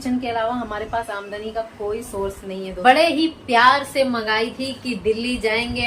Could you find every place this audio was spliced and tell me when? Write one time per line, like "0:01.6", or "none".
0:02.8